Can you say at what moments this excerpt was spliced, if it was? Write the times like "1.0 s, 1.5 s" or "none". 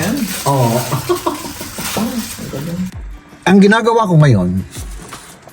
2.9 s